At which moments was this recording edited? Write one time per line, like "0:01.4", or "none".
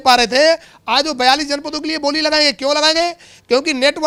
none